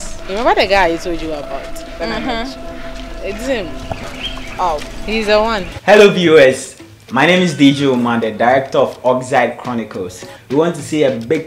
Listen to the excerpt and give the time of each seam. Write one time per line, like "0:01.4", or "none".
0:05.7